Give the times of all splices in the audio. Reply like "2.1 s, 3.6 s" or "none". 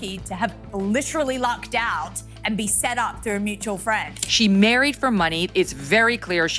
4.2 s